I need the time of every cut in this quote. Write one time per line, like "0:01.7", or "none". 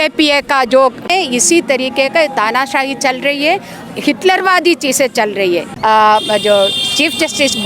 0:01.1
0:05.7

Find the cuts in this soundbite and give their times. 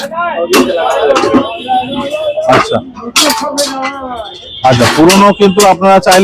none

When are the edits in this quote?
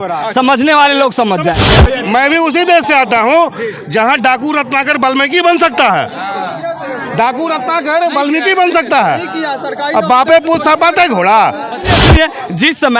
0:01.6
0:12.0

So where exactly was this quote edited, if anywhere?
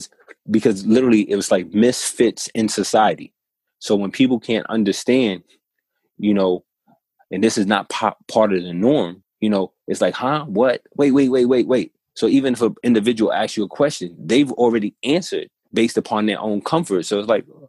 0:09.2
0:15.6

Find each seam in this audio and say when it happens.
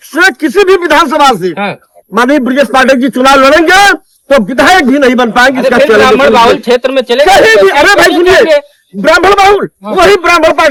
none

